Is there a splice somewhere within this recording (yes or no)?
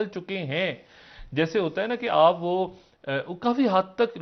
no